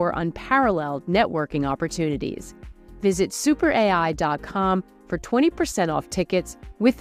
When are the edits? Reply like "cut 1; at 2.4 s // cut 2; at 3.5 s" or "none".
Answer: none